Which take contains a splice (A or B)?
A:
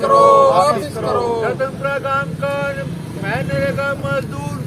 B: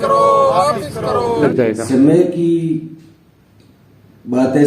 B